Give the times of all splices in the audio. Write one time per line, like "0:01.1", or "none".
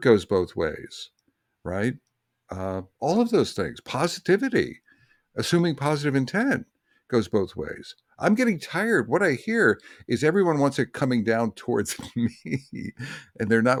none

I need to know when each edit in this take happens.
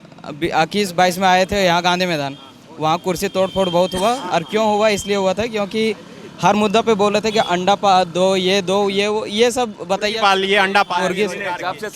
none

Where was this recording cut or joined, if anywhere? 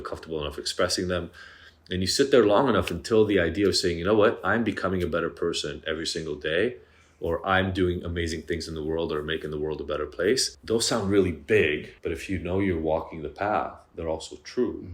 0:10.5
0:11.9

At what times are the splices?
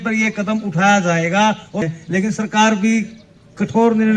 0:01.9

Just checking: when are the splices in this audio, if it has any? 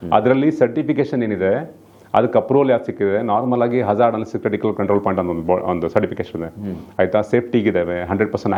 none

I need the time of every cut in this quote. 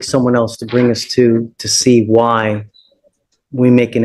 none

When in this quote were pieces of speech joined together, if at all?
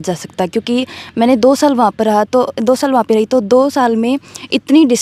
none

